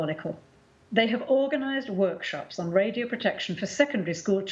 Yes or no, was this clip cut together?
no